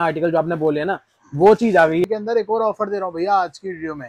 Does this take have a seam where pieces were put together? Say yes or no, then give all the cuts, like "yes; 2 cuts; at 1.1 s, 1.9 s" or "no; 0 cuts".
yes; 1 cut; at 2.1 s